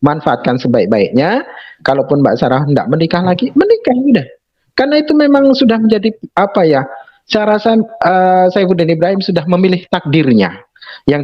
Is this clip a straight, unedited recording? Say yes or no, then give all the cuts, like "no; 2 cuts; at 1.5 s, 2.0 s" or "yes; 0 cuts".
yes; 0 cuts